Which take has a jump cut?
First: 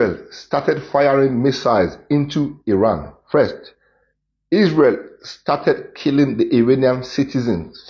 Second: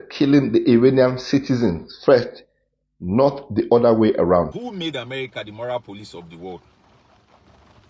second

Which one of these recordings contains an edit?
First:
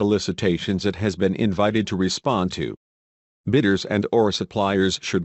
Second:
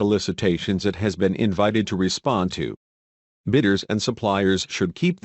second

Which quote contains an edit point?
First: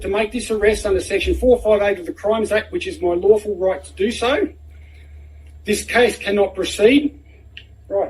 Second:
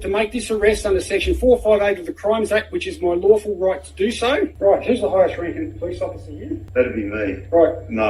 second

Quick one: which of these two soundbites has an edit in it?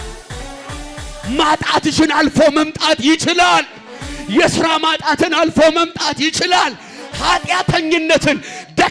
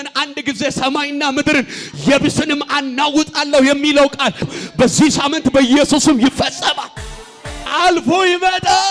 second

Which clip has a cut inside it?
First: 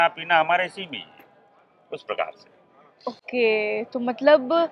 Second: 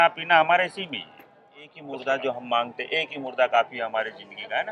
second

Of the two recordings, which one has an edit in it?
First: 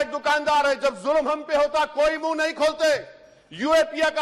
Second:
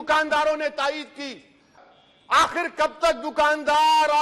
second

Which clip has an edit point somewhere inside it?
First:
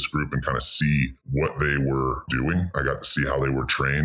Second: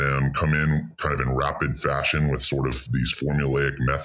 first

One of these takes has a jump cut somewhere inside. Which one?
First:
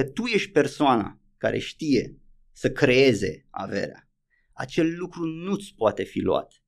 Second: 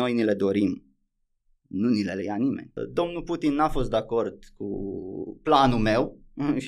second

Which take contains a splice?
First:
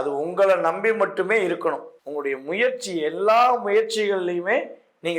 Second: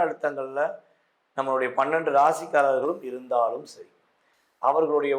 first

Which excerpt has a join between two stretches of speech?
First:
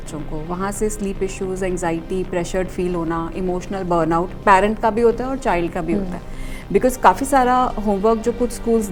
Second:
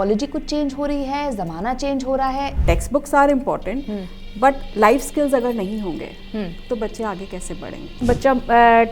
second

